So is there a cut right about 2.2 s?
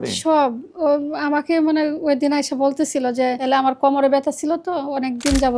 no; 1 cut; at 3.4 s

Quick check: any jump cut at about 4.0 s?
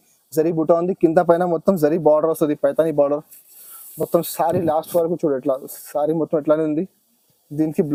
no; 0 cuts

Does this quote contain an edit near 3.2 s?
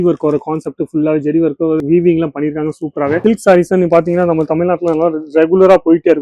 yes; 1 cut; at 3.2 s

